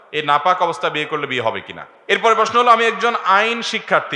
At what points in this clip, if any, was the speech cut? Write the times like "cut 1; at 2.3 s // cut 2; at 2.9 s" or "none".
cut 1; at 1.9 s